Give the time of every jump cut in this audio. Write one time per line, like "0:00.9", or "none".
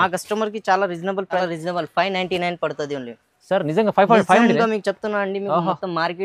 0:01.4